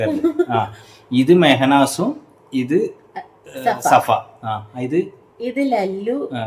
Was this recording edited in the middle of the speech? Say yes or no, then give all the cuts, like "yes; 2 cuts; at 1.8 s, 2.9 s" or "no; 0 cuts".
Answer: no; 0 cuts